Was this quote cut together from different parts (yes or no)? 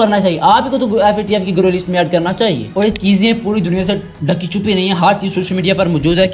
yes